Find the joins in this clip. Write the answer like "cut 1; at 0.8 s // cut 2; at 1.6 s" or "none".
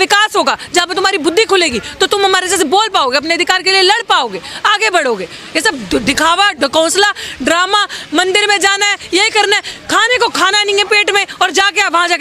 none